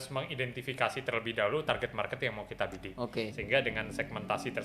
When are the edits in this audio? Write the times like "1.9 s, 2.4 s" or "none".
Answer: 3.4 s